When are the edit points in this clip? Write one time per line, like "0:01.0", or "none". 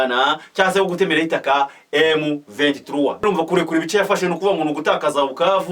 0:03.2